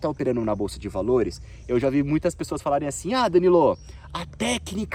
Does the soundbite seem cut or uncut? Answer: uncut